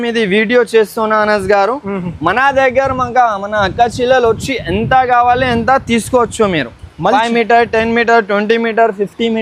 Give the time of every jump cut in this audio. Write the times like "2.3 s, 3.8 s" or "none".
none